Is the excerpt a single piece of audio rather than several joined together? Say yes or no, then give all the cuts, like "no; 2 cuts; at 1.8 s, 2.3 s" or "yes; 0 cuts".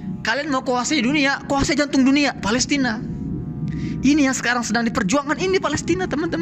yes; 0 cuts